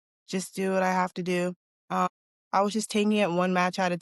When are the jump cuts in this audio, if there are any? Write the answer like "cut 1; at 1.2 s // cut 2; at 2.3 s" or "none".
cut 1; at 2.1 s